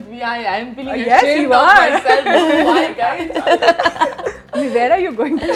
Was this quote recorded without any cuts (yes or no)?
yes